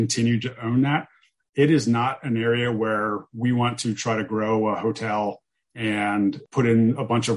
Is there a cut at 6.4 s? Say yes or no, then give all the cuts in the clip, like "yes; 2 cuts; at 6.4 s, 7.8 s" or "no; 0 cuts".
yes; 1 cut; at 6.4 s